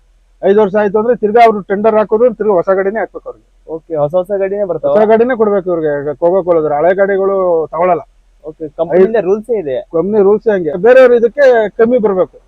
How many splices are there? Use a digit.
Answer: 1